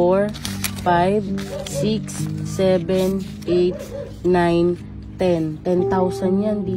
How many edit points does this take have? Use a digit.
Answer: 0